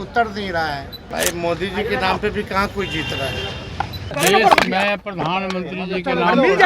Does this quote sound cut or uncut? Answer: cut